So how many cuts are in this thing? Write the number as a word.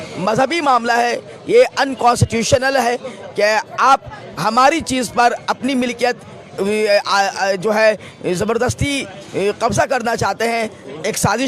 zero